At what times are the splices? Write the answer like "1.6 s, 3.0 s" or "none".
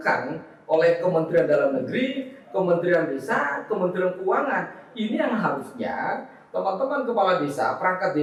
none